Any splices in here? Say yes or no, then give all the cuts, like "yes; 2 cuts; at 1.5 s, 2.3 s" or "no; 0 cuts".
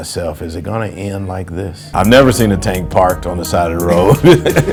no; 0 cuts